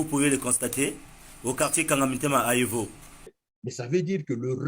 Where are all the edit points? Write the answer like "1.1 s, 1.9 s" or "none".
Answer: 3.5 s